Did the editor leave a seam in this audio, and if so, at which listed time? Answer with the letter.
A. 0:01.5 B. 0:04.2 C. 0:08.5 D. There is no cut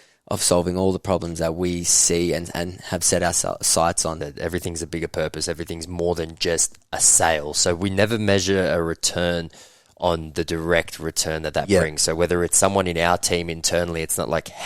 B